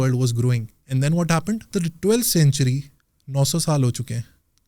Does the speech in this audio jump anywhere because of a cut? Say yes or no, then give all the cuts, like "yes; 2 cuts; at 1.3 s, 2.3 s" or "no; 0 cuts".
yes; 1 cut; at 1.7 s